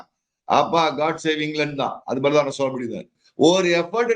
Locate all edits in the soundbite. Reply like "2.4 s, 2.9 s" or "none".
3.2 s